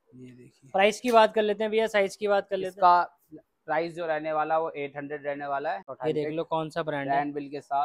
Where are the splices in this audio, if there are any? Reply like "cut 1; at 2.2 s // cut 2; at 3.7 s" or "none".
cut 1; at 5.9 s